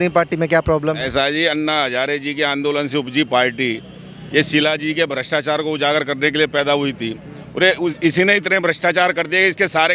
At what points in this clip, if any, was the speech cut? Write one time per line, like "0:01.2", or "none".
none